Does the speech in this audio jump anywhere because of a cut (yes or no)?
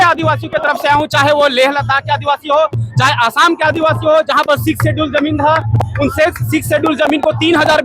no